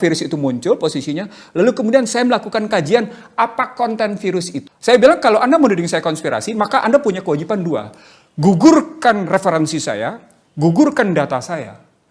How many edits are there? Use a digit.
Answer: 1